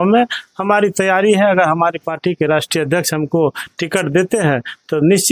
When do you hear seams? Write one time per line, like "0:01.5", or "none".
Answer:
none